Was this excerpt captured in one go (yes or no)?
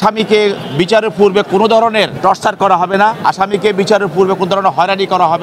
no